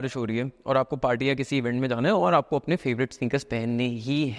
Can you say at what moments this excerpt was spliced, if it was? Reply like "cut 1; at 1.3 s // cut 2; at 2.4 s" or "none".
none